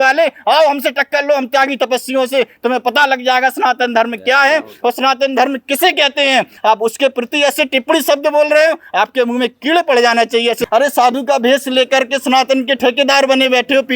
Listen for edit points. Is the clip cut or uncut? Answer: cut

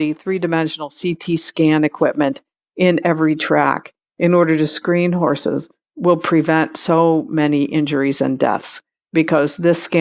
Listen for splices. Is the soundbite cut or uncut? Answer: uncut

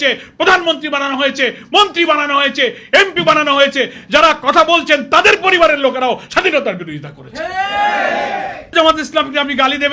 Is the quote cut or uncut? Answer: cut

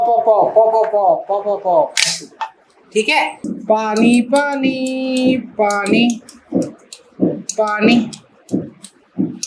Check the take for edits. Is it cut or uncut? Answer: cut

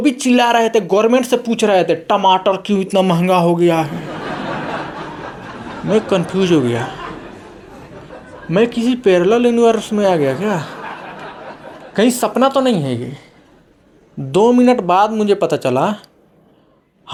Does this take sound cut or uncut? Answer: uncut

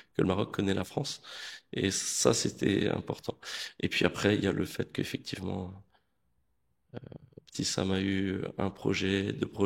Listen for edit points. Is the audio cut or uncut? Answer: uncut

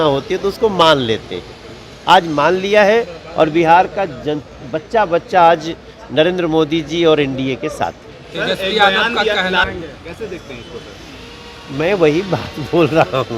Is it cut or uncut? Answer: uncut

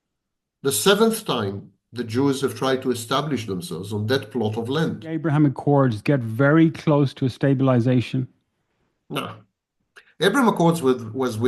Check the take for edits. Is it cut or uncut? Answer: cut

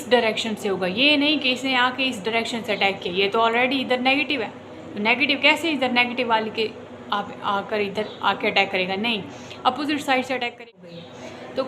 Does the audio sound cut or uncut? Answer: cut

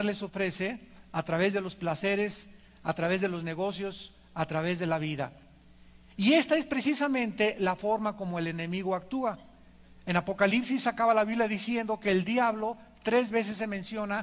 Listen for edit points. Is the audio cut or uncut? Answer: uncut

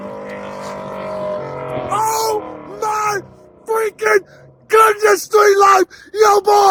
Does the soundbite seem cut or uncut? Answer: uncut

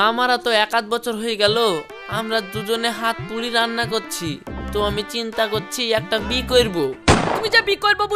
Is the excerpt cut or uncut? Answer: cut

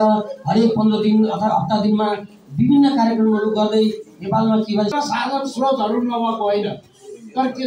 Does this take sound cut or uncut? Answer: cut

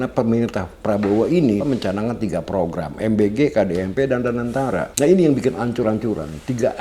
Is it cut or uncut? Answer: cut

